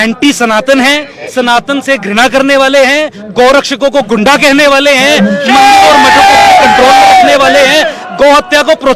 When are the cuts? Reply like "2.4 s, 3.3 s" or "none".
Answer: none